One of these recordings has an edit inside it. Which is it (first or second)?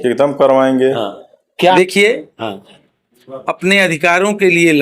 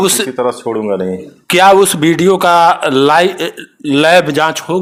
first